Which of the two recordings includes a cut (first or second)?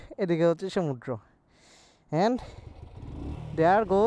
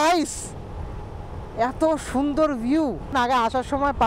second